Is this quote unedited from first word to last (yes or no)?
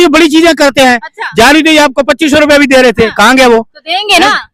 yes